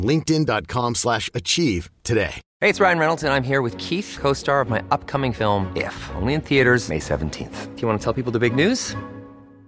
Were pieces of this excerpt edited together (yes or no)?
yes